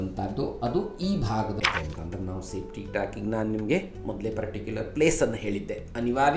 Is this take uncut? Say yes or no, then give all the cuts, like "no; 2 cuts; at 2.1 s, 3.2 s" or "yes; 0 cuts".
no; 1 cut; at 1.6 s